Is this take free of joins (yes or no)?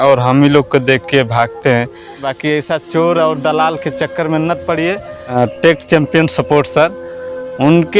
no